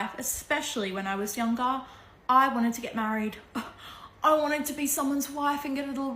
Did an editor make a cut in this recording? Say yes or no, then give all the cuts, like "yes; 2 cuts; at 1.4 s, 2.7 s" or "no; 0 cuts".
no; 0 cuts